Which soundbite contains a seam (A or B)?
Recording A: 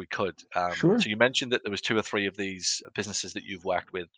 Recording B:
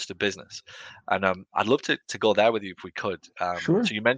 A